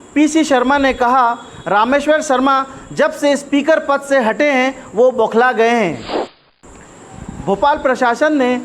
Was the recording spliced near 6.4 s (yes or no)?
yes